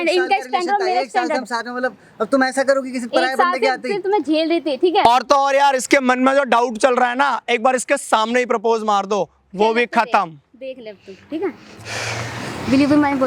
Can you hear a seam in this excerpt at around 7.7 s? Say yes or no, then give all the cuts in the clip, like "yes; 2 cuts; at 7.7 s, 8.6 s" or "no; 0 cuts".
no; 1 cut; at 5.0 s